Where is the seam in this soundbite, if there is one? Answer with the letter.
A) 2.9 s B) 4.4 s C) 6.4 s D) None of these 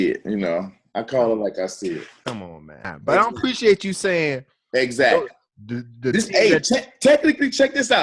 A